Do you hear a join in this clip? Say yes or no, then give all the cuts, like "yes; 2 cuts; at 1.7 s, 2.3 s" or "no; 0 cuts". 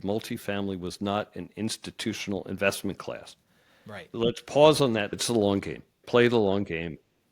yes; 2 cuts; at 4.1 s, 5.2 s